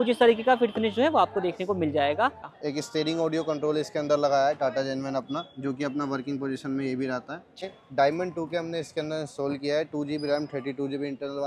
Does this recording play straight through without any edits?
no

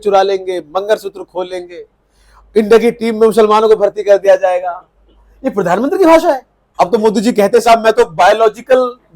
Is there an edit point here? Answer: yes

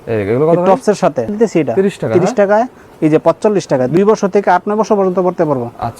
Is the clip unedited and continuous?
no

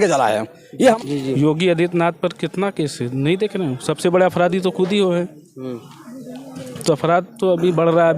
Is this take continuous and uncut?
no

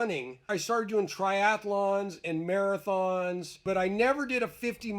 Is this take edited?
yes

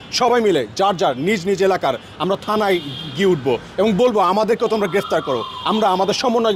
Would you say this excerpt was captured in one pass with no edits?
yes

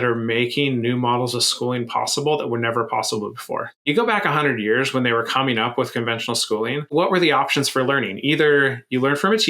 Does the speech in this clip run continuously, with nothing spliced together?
no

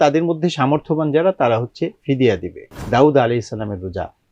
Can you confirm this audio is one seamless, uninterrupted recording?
no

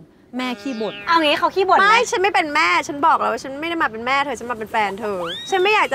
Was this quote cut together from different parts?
no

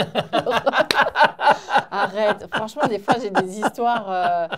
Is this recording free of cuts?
yes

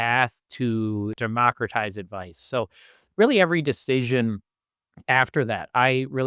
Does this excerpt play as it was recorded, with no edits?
no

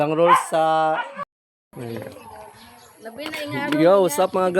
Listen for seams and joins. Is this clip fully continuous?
no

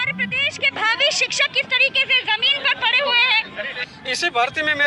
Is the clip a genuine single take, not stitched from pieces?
no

